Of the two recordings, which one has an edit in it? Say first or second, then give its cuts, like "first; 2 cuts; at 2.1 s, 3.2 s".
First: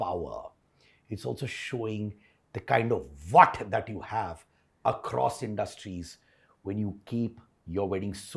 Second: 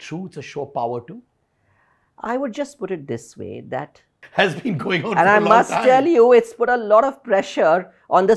second; 1 cut; at 4.2 s